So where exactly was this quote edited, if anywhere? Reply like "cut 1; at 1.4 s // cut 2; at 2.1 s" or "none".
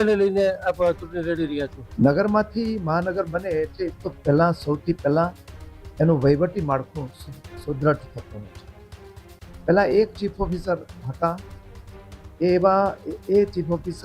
cut 1; at 1.8 s